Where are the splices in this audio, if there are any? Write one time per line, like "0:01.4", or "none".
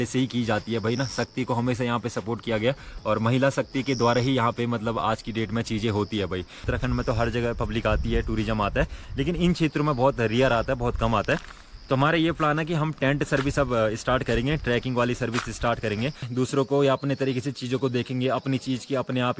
0:06.6
0:16.3